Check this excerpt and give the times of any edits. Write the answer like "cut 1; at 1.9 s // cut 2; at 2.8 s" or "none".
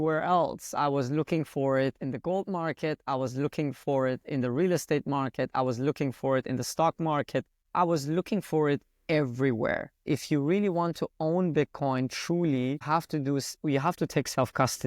cut 1; at 7.6 s // cut 2; at 10.0 s // cut 3; at 12.8 s